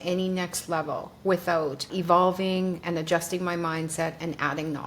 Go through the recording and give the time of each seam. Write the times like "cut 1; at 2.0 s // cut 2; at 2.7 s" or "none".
cut 1; at 1.9 s